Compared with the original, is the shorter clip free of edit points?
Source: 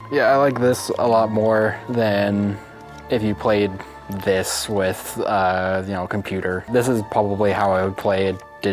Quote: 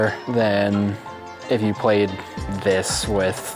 yes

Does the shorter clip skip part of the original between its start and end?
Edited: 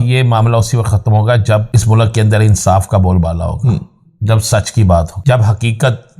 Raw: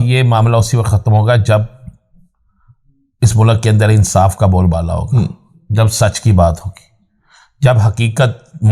yes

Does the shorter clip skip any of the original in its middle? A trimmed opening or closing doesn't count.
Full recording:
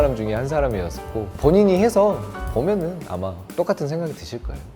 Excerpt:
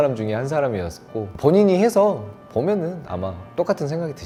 no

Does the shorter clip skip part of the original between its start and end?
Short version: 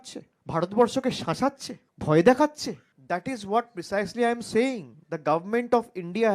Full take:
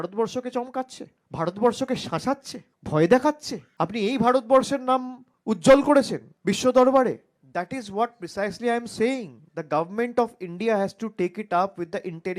yes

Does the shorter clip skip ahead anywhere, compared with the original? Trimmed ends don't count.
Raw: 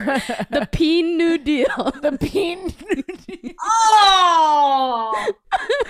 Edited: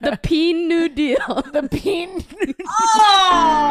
yes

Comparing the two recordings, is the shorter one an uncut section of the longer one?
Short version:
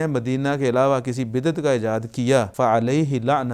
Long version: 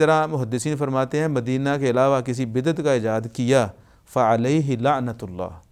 no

